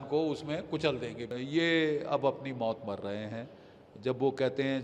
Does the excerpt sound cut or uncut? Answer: cut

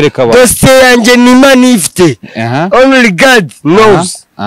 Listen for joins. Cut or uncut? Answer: uncut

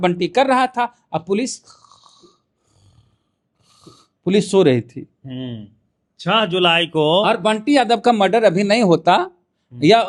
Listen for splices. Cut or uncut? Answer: uncut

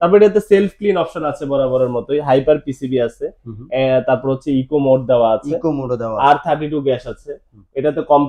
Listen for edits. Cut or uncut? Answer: uncut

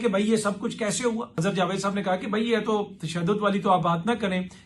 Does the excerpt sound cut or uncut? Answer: cut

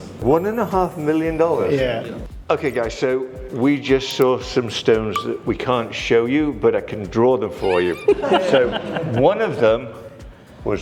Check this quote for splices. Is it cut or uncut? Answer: cut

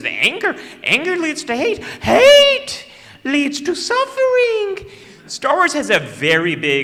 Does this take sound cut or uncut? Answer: uncut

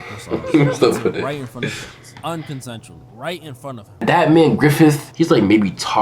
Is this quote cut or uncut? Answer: cut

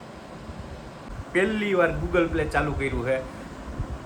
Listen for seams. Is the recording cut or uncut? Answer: cut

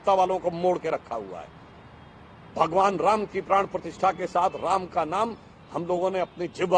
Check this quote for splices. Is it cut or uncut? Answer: uncut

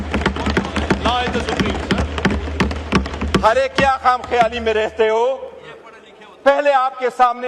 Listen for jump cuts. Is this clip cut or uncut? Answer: uncut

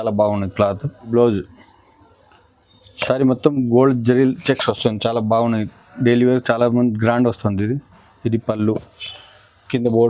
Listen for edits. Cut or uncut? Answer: cut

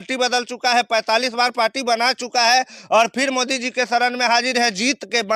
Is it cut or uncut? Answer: uncut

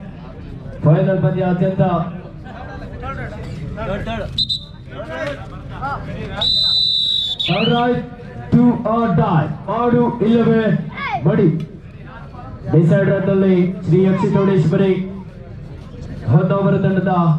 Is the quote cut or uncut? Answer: uncut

